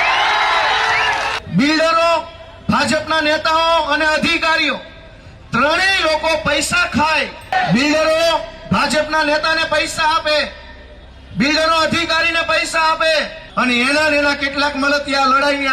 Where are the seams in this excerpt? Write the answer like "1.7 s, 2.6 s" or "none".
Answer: 1.4 s, 7.5 s, 13.4 s